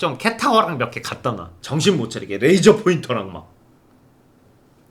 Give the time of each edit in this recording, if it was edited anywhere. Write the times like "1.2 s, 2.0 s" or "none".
1.5 s